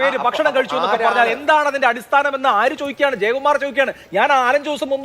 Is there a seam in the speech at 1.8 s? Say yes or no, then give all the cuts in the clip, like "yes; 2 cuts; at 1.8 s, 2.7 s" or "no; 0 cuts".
no; 1 cut; at 3.2 s